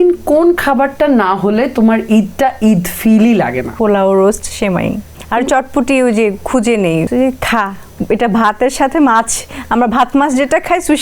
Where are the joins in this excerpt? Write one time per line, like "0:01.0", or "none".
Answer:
0:03.7
0:05.1
0:07.1